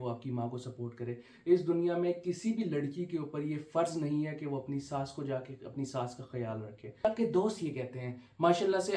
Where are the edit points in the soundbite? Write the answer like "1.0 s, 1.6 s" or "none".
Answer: 7.0 s